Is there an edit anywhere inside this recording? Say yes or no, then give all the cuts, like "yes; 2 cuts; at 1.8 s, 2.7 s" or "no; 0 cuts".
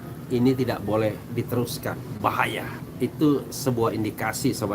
yes; 1 cut; at 2.7 s